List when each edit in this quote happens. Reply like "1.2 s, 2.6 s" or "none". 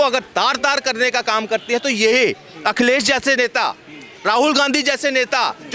none

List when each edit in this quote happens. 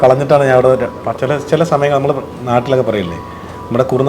1.0 s

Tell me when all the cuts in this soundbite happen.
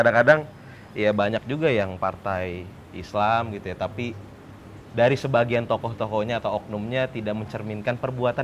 none

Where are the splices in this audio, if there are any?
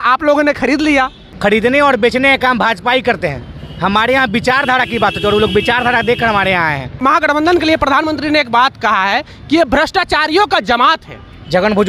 1.2 s, 7.0 s

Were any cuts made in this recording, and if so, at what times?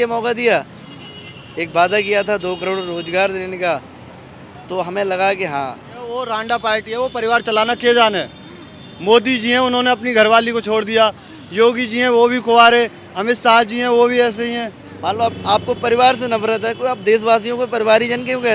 6.2 s, 14.9 s

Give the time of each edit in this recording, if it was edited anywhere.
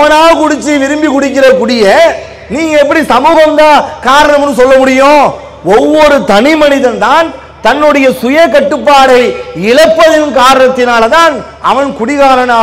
none

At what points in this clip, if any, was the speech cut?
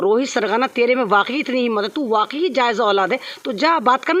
none

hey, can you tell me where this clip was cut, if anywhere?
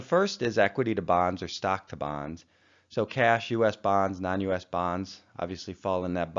none

